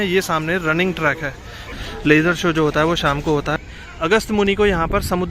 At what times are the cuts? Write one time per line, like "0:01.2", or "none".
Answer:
0:01.7
0:03.5

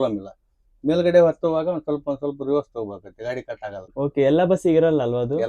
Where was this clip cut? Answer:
0:03.8

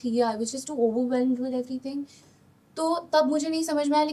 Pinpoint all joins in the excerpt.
none

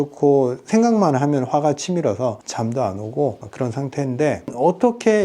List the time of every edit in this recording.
0:02.5
0:04.5

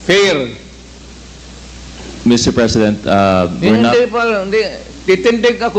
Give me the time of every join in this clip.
none

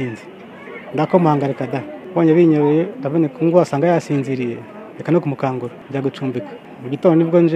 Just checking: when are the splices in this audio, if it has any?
0:02.0
0:05.8
0:06.6

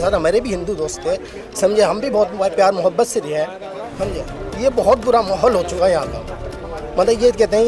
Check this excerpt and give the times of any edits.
none

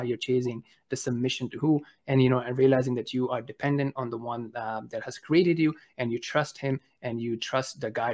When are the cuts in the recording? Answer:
none

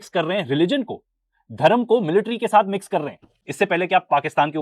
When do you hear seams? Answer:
0:03.4

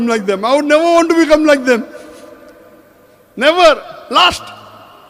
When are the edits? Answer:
none

